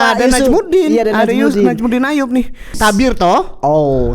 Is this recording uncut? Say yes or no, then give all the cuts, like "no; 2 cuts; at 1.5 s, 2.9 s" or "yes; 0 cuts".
no; 1 cut; at 2.6 s